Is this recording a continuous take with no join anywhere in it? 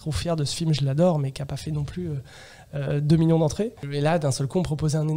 no; 1 cut; at 3.9 s

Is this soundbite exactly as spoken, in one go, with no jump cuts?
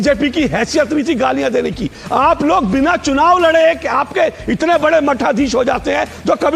yes; 0 cuts

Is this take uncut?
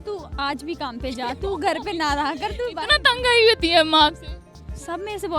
yes; 0 cuts

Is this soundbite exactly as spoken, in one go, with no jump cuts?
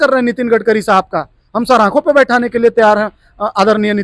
yes; 0 cuts

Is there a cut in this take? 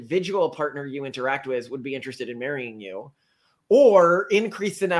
no; 0 cuts

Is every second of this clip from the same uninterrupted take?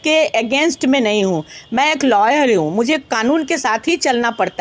yes; 0 cuts

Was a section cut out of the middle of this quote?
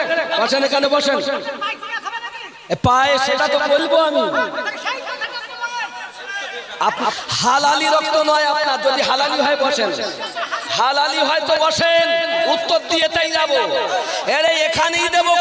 yes; 1 cut; at 7.2 s

